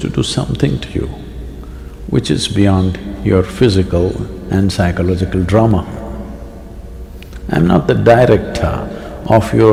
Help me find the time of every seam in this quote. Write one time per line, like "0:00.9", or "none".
none